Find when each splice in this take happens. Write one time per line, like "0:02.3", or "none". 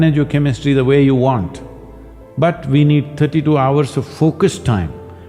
none